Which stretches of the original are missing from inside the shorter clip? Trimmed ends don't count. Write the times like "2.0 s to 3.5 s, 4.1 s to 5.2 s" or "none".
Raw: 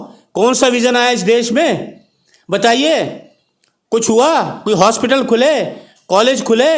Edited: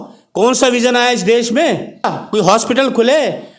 2.2 s to 4.5 s